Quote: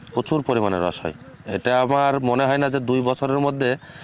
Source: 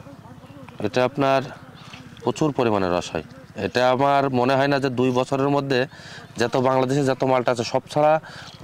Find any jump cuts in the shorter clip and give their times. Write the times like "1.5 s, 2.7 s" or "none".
none